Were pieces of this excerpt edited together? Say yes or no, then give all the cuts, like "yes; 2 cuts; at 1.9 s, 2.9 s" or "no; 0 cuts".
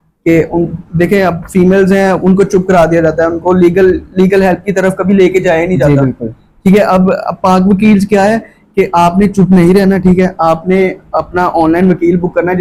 no; 0 cuts